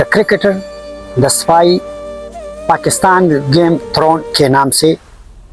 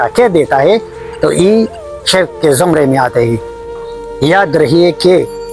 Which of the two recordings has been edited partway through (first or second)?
second